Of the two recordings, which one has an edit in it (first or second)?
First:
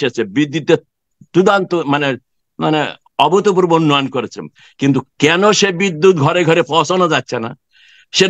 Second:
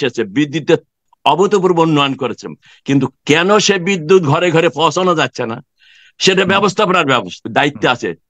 second